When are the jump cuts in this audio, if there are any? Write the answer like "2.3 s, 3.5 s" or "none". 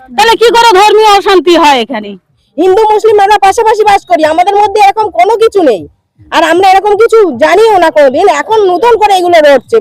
2.4 s